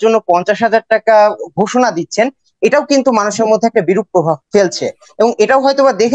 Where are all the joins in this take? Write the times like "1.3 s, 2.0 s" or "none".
4.4 s

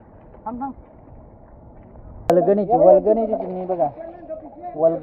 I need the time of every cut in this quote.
2.3 s

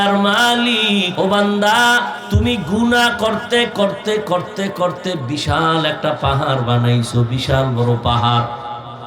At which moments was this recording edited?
1.1 s, 2.2 s

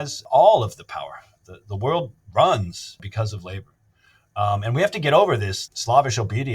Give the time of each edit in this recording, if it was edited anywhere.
3.0 s

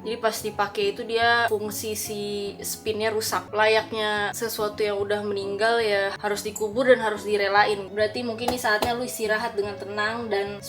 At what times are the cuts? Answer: 3.4 s, 6.1 s, 7.9 s

